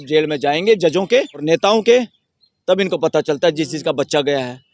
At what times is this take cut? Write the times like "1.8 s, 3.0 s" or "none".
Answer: 1.4 s